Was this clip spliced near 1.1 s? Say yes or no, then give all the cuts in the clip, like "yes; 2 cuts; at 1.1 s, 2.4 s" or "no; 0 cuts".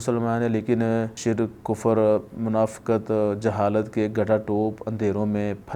yes; 1 cut; at 1.1 s